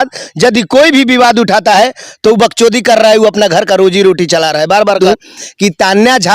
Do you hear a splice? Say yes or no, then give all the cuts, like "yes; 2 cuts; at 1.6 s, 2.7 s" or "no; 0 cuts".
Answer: yes; 1 cut; at 5.0 s